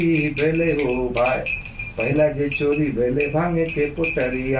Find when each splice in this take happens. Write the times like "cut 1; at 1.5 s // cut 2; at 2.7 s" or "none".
none

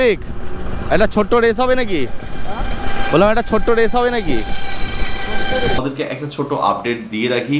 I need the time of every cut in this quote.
cut 1; at 5.8 s

